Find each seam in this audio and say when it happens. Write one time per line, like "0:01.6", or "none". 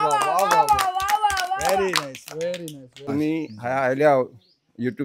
0:03.1